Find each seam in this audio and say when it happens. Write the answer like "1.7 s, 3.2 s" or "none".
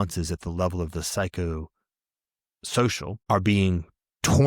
3.2 s